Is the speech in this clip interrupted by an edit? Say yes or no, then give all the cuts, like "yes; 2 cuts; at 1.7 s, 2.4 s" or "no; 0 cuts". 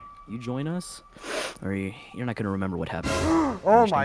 no; 0 cuts